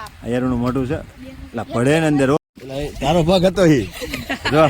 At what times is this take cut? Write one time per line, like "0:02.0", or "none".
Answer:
0:02.4